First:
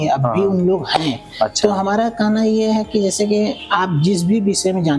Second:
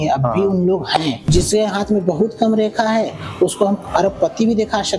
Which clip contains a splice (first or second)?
second